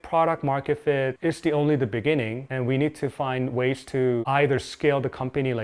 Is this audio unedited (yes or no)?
yes